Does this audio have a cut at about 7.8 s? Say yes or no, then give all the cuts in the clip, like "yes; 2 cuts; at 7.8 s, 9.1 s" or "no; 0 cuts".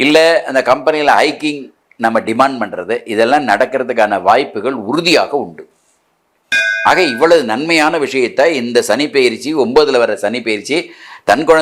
no; 1 cut; at 6.6 s